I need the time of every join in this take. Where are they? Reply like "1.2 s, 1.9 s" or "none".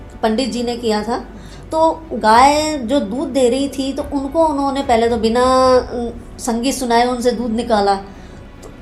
none